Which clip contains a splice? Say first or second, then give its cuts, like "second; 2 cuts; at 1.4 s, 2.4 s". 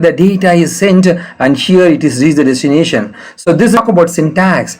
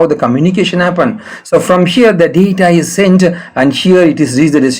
first; 1 cut; at 3.8 s